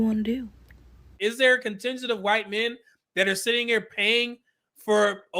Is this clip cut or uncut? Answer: cut